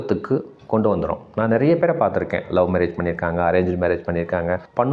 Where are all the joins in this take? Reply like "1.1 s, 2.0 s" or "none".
none